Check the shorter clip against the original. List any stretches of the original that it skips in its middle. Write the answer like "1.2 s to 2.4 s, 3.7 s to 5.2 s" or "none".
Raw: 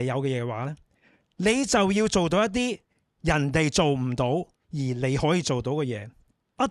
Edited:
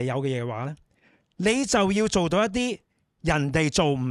none

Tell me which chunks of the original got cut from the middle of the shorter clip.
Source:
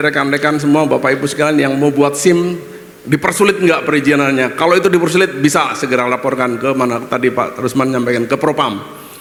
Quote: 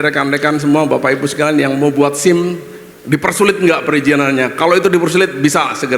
none

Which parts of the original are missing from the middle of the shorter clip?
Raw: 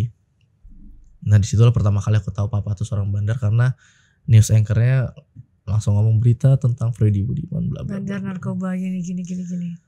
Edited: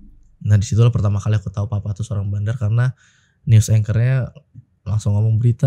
none

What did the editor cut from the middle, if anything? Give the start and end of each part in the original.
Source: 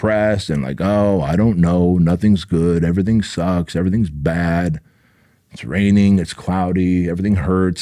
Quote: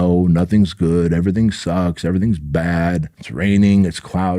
4.9 s to 5.5 s

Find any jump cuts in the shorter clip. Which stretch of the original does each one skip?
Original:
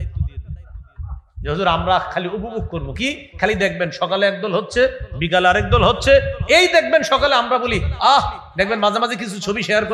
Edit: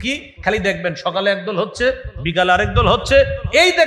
none

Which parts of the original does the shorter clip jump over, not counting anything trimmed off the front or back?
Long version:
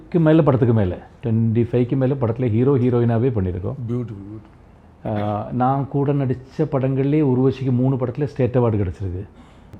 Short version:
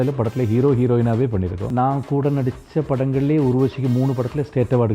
3.7 s to 5.5 s

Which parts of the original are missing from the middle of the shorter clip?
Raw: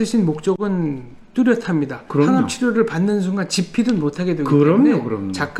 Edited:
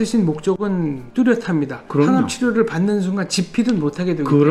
1.0 s to 1.2 s

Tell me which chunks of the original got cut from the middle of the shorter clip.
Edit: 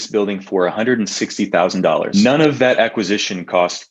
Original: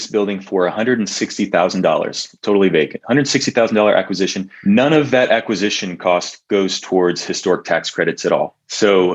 2.1 s to 4.6 s

